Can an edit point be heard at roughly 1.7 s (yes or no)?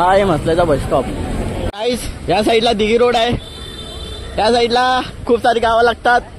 yes